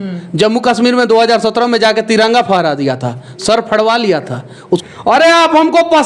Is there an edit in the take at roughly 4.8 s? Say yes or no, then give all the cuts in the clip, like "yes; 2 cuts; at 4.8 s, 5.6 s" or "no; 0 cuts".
yes; 1 cut; at 4.8 s